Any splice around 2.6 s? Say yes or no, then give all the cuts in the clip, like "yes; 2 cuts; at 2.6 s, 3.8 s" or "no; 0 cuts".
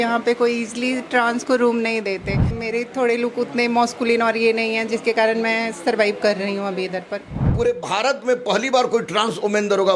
yes; 2 cuts; at 2.6 s, 7.5 s